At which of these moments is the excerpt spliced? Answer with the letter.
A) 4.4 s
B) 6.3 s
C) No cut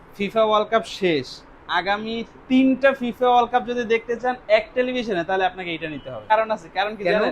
B